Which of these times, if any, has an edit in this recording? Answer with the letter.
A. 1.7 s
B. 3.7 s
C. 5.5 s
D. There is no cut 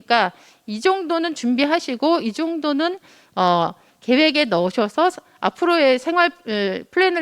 D